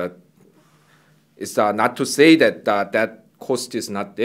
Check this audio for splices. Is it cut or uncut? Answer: uncut